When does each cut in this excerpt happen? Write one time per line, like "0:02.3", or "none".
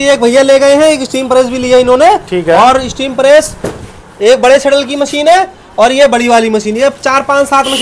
none